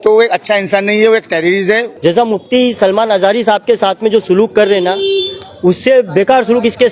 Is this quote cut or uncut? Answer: cut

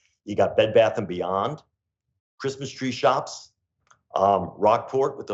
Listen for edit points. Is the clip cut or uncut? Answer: uncut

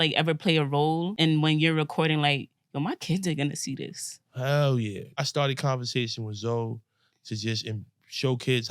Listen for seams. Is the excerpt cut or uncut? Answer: cut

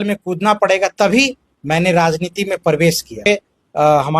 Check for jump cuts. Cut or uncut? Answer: cut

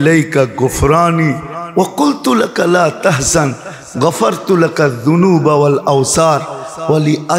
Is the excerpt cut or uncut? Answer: uncut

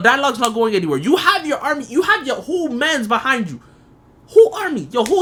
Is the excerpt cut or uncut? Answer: uncut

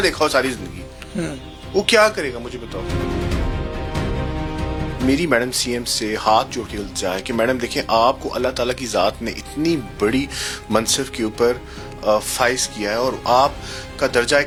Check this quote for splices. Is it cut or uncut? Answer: uncut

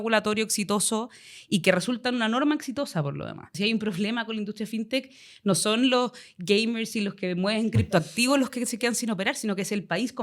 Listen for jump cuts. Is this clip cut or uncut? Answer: cut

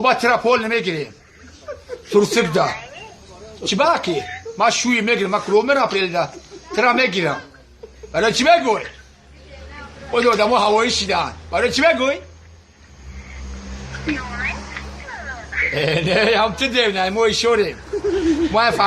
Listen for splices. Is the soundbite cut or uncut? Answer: cut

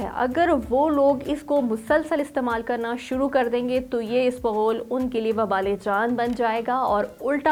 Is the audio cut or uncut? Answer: uncut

